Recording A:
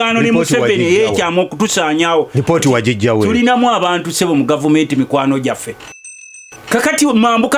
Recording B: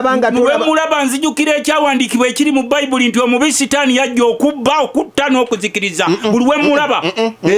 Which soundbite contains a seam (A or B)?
A